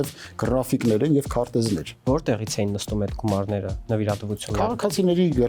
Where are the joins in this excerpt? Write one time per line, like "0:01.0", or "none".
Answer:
0:02.0